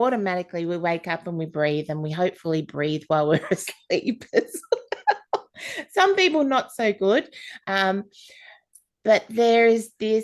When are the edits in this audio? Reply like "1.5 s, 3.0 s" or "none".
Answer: none